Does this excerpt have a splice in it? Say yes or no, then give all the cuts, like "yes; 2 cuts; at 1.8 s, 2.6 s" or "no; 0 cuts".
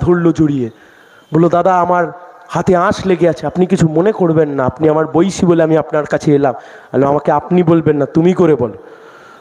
no; 0 cuts